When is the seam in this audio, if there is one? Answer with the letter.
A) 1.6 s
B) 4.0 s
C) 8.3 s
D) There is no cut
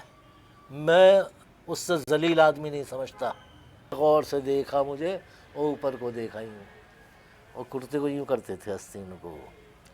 B